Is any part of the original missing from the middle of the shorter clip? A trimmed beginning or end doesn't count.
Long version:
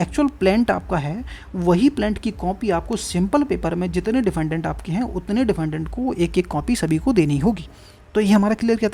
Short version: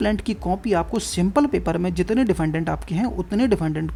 no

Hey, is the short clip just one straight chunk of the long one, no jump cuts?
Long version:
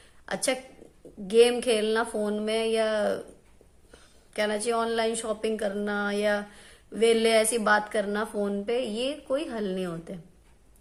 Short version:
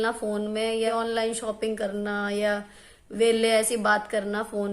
no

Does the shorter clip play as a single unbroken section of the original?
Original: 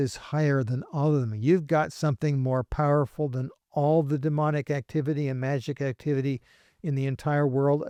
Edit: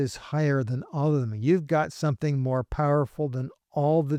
yes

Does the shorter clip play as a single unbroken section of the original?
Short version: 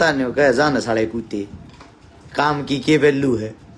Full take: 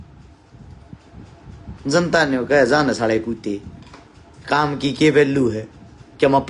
yes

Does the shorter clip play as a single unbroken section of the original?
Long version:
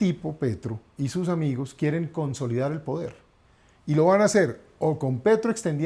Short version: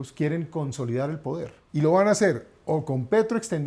no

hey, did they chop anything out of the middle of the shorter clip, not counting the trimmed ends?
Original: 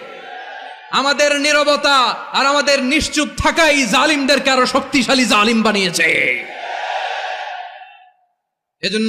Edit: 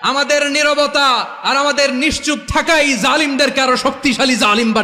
no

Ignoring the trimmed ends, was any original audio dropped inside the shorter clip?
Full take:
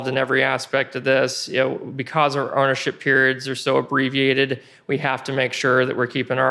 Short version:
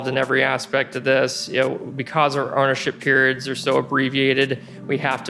no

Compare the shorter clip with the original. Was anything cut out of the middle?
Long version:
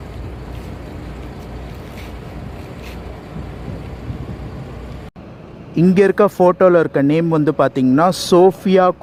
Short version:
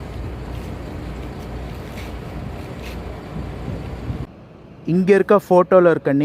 yes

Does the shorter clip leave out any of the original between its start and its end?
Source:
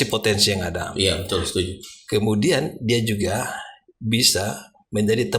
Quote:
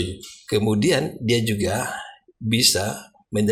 no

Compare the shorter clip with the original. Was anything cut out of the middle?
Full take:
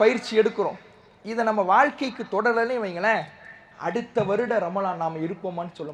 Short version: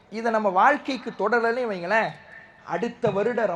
no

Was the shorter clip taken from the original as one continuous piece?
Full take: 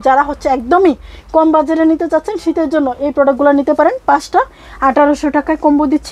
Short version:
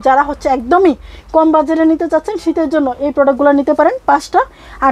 yes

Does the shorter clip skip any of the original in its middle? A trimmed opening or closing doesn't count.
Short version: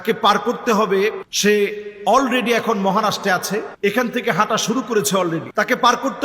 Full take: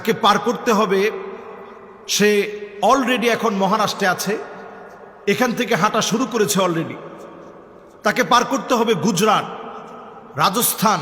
yes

